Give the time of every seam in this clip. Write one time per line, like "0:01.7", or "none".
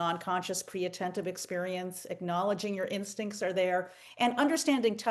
none